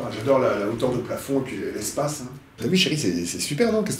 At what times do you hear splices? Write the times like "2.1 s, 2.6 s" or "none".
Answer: none